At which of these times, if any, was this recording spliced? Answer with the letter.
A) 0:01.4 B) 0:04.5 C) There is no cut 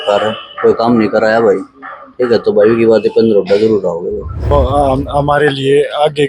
B